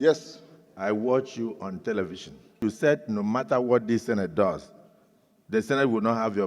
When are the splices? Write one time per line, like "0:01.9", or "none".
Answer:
0:02.6